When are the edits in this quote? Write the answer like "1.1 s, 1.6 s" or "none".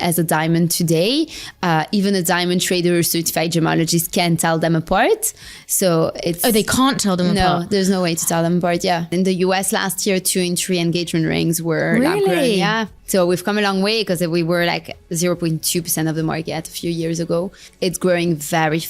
9.1 s, 12.9 s, 17.7 s